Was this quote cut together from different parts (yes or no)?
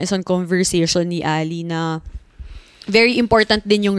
no